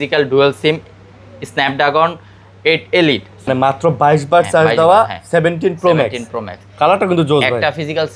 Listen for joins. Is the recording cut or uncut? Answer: cut